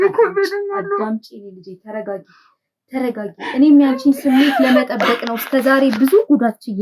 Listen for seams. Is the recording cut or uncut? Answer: uncut